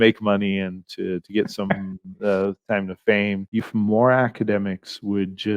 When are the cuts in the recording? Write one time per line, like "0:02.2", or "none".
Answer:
0:03.7

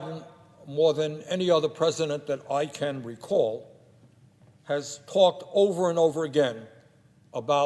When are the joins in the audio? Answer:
none

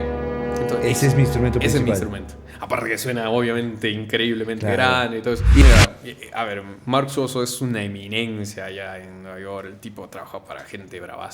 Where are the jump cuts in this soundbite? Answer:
0:05.6

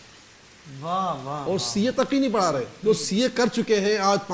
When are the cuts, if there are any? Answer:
0:02.7

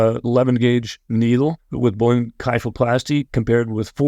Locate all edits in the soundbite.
0:01.0
0:01.7

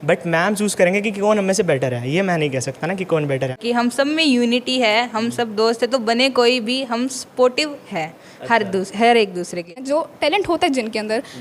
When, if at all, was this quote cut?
0:03.6
0:09.7

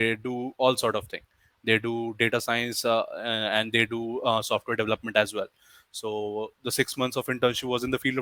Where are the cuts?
none

